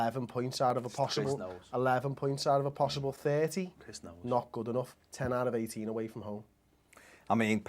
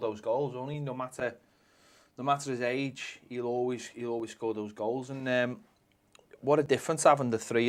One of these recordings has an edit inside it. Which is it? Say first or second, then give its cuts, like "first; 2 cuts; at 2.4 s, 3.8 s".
first; 1 cut; at 3.6 s